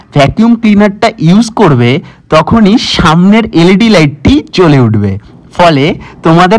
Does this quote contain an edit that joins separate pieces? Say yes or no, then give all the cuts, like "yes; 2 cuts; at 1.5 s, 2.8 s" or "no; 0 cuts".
no; 0 cuts